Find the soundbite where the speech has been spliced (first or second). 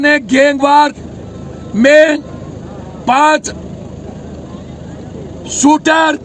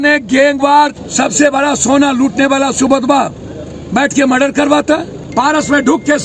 second